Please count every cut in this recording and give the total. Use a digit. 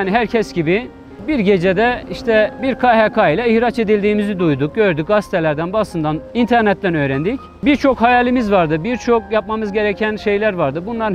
4